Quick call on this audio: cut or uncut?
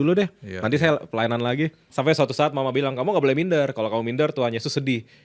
cut